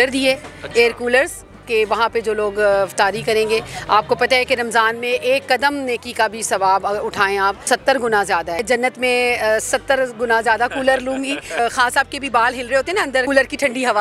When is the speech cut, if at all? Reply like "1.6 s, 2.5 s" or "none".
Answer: 7.7 s, 8.6 s, 11.6 s, 13.2 s